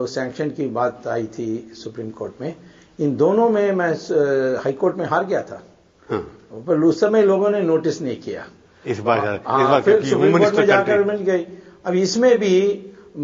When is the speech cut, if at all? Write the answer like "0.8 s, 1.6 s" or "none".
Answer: 4.8 s

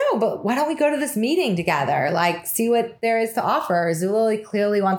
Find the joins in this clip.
none

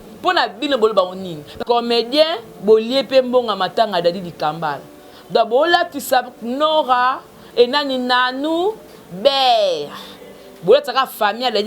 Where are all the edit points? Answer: 1.6 s

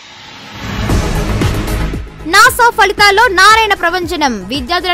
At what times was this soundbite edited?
1.4 s

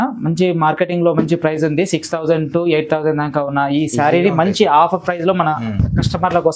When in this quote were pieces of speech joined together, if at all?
none

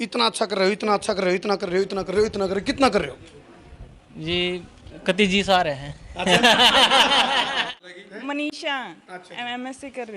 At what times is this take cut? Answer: 7.8 s

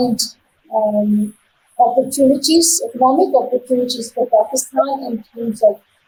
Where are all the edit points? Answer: none

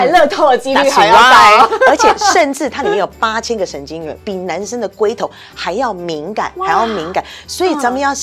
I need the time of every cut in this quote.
none

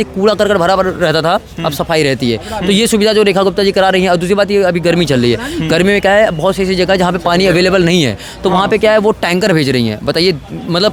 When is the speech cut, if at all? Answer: none

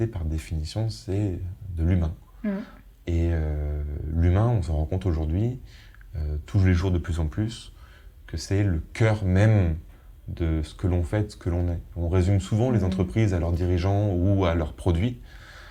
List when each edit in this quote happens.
none

